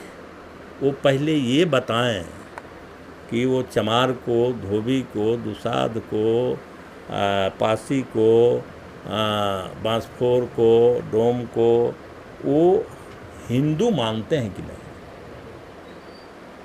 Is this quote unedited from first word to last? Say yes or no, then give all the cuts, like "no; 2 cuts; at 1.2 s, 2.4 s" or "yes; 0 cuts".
yes; 0 cuts